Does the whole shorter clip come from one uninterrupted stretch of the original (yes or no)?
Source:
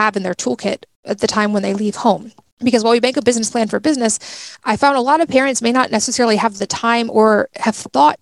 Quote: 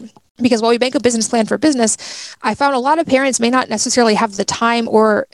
yes